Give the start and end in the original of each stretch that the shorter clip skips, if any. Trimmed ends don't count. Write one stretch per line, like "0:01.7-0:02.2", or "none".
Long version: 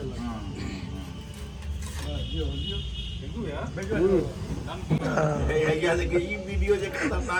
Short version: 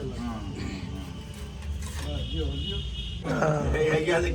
0:03.3-0:05.0